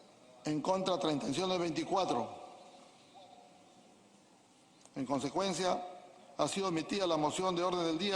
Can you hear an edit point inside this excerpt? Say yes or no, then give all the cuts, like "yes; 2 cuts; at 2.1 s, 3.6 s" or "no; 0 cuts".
yes; 1 cut; at 1.3 s